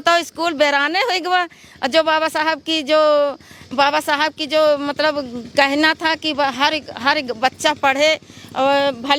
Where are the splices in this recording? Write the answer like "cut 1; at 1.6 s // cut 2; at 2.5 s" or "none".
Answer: none